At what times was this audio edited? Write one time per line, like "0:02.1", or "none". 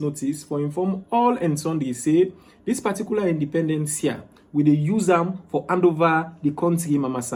none